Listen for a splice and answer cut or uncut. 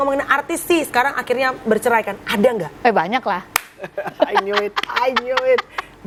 uncut